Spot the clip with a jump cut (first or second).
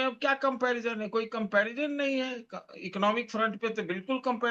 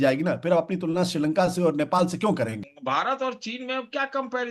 second